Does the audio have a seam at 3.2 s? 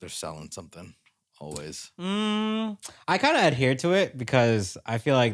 no; 0 cuts

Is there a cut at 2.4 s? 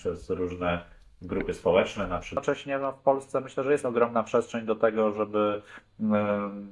yes; 1 cut; at 2.4 s

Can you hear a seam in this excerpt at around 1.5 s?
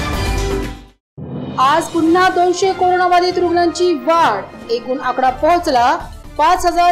yes; 1 cut; at 1.5 s

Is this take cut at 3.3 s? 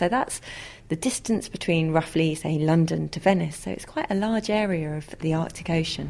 no; 1 cut; at 5.2 s

